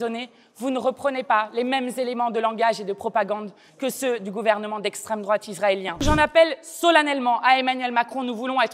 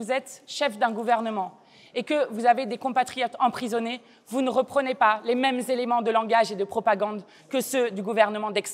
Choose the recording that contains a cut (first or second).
first